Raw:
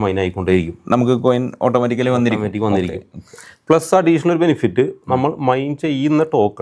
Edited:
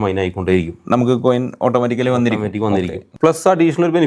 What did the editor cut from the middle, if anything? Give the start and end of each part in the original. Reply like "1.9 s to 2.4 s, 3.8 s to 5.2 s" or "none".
3.0 s to 3.5 s